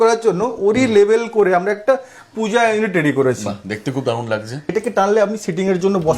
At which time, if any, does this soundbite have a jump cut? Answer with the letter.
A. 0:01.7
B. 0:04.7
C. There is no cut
B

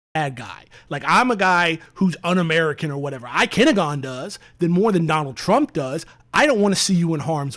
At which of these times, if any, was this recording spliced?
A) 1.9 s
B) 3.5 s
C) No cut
B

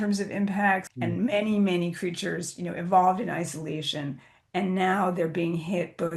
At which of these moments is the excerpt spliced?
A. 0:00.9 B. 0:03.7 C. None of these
A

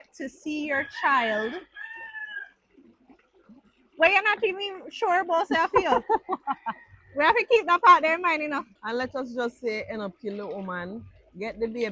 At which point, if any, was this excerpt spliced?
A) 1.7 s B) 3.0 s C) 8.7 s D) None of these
C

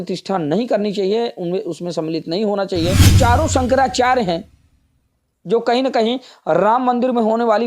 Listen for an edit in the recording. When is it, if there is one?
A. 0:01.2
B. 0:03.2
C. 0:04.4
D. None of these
B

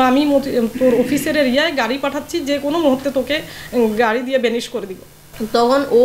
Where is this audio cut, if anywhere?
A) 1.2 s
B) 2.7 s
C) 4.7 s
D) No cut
C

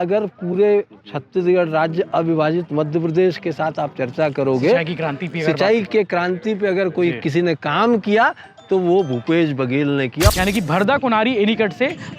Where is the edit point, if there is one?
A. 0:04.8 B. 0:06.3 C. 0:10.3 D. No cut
C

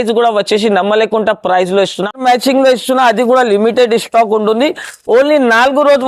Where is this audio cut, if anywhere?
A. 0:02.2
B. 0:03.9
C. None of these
A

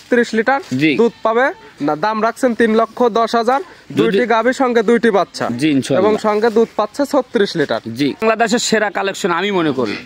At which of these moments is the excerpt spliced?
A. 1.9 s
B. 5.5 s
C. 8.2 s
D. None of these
C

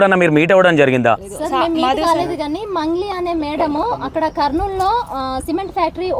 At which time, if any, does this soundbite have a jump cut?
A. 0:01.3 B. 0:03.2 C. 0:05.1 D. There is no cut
A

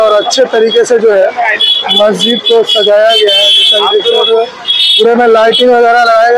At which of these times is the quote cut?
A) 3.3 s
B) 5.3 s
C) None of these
C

